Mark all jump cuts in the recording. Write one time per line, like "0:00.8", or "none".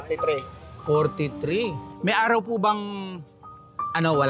0:01.8